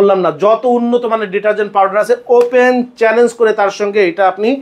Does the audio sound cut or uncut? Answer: uncut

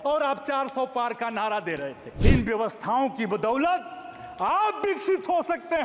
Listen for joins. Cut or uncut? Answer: cut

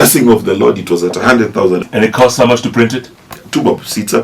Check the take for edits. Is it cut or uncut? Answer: cut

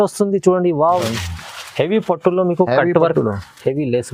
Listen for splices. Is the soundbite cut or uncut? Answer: cut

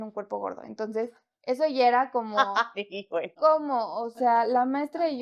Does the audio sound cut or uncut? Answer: uncut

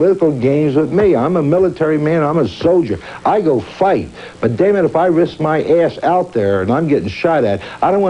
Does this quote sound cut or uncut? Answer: uncut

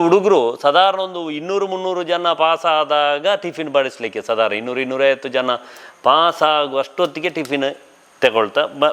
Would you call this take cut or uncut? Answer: uncut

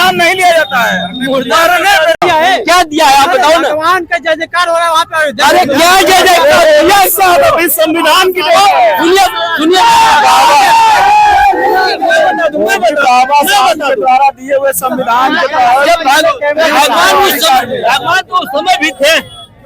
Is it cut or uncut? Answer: cut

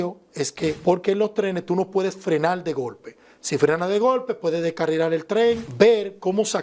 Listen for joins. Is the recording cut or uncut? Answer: cut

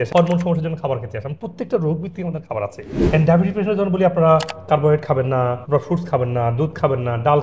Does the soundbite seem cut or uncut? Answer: cut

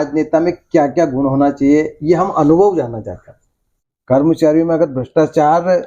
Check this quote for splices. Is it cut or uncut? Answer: cut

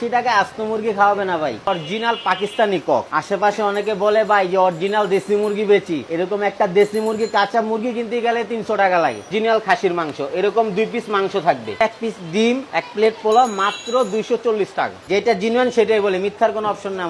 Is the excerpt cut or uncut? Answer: cut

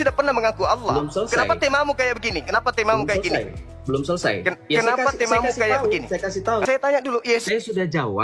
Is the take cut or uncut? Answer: cut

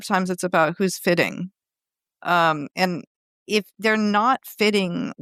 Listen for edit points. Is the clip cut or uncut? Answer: uncut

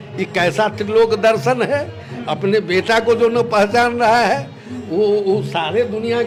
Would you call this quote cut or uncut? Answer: uncut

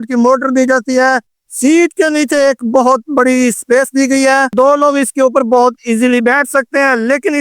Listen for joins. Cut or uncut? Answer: cut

